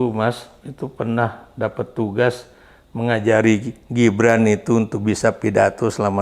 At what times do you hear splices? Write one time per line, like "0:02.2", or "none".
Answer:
none